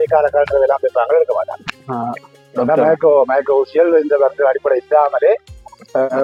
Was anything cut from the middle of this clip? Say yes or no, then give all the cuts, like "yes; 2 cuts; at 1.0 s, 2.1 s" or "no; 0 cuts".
no; 0 cuts